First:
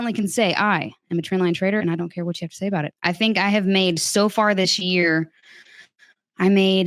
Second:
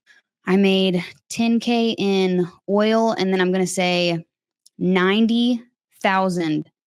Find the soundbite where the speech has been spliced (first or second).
first